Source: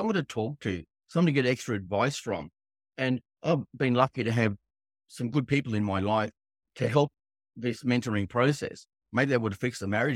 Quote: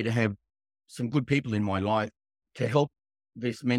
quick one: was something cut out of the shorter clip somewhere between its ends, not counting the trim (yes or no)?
no